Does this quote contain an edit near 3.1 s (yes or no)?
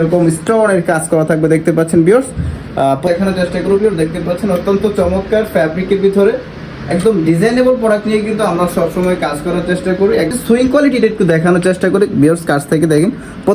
yes